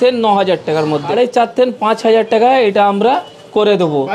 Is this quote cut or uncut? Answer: cut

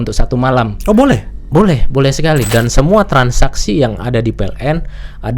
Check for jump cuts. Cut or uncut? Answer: cut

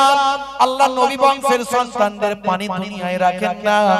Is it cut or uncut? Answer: uncut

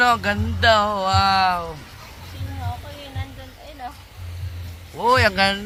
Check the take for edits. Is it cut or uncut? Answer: uncut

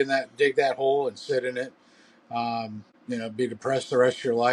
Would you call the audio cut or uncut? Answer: cut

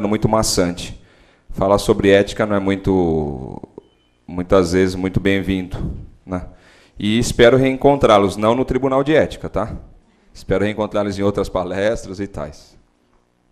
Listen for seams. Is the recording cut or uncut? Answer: uncut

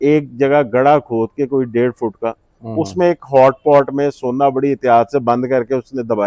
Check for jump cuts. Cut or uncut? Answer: uncut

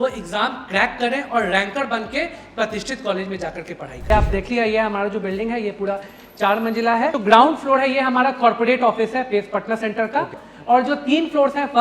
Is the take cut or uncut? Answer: cut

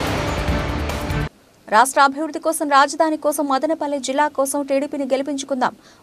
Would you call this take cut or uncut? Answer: cut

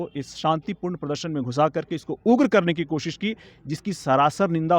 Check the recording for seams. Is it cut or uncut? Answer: uncut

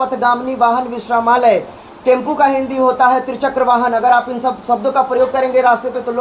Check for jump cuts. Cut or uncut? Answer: uncut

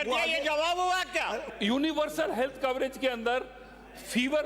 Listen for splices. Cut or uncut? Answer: cut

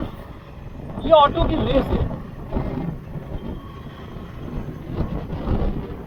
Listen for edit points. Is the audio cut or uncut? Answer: uncut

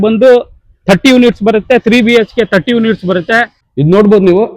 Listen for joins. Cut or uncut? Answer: cut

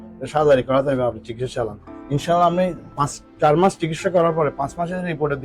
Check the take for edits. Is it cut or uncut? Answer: uncut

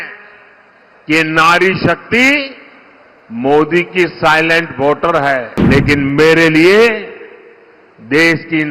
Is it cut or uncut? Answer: cut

